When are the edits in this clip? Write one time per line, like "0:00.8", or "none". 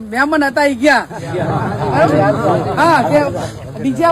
none